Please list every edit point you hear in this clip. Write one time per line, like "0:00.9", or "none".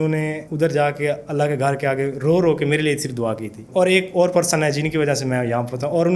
0:03.6